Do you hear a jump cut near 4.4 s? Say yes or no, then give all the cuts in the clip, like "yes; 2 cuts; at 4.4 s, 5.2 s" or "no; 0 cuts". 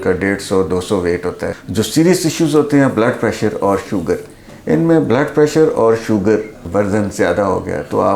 no; 2 cuts; at 1.6 s, 6.6 s